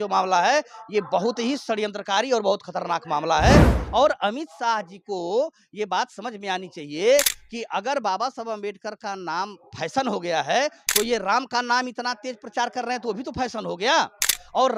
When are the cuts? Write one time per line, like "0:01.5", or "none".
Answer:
0:03.8